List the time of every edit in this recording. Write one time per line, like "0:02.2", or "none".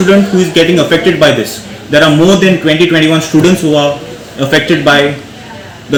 none